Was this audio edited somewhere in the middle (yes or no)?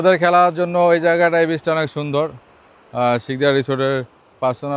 no